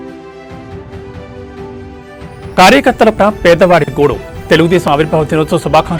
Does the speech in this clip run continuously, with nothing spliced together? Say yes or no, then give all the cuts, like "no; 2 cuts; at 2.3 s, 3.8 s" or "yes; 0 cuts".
yes; 0 cuts